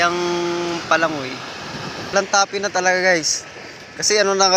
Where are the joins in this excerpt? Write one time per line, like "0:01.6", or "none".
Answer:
0:02.1